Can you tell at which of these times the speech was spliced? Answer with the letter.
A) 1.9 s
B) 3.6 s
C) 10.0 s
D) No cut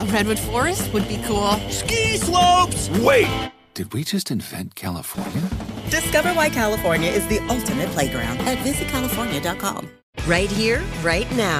C